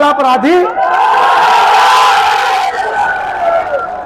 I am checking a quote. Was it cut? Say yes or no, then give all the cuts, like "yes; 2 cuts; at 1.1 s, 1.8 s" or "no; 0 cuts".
no; 0 cuts